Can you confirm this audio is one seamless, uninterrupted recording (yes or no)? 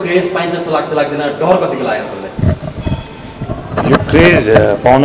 yes